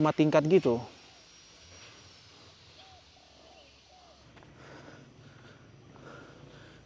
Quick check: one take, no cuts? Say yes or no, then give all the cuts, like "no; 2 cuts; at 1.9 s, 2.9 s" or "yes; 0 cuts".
no; 1 cut; at 4.3 s